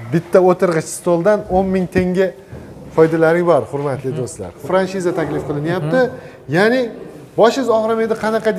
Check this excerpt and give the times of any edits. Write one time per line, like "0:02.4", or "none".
0:04.6